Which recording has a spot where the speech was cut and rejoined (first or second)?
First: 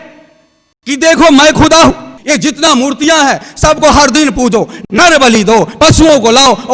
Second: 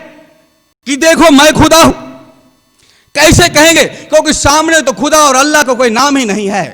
first